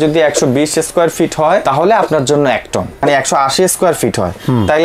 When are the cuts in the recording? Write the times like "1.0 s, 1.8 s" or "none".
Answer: 1.6 s, 3.0 s